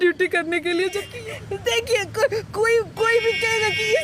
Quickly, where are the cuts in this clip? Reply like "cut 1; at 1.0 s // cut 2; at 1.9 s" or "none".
cut 1; at 1.1 s